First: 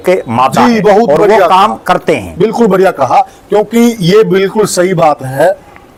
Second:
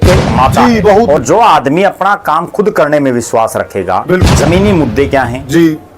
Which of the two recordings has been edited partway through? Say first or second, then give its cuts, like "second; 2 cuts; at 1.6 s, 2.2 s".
second; 2 cuts; at 1.2 s, 4.2 s